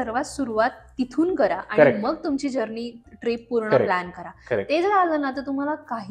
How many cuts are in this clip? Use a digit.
0